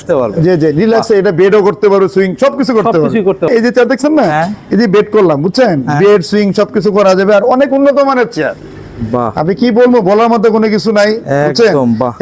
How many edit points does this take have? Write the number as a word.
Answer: one